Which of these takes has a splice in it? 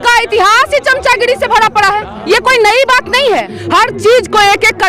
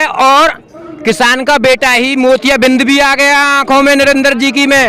first; 1 cut; at 3.5 s

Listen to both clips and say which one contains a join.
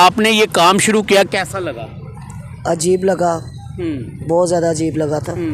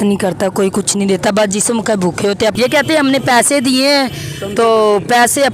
second; 1 cut; at 2.5 s

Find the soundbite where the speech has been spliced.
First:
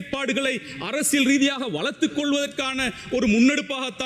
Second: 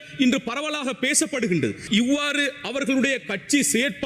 second; 1 cut; at 1.8 s

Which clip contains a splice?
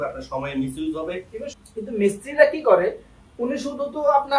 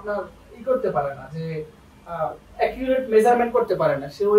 first; 1 cut; at 1.4 s

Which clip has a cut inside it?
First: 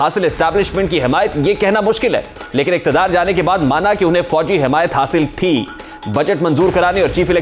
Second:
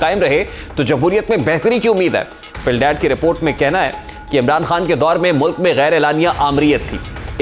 first; 1 cut; at 2.4 s

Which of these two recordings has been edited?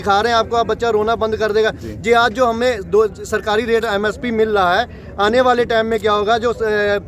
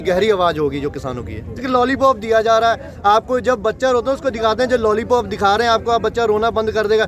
second; 1 cut; at 1.6 s

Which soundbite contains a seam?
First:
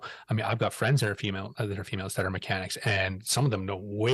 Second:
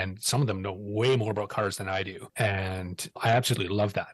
second; 2 cuts; at 2.2 s, 3.0 s

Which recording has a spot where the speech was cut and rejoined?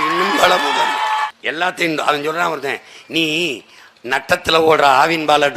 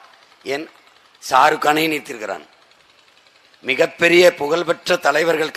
first; 1 cut; at 1.3 s

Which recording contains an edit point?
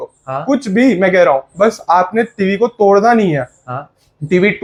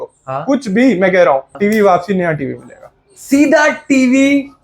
second; 1 cut; at 1.5 s

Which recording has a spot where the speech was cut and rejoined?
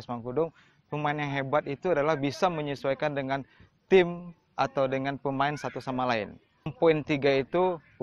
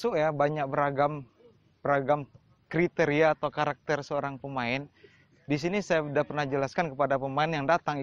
first; 1 cut; at 6.7 s

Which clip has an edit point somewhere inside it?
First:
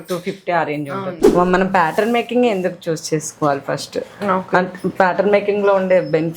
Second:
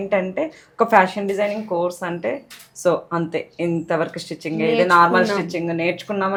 first; 1 cut; at 1.2 s

